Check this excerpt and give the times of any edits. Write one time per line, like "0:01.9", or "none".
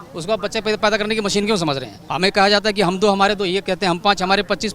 0:02.0